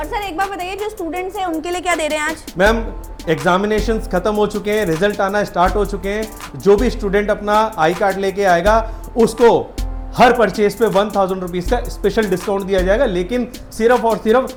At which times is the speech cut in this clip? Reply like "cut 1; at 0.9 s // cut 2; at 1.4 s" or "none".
none